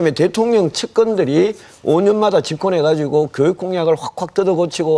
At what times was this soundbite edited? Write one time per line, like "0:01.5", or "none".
0:03.3